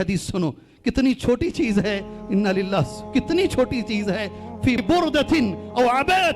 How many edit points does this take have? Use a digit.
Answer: 1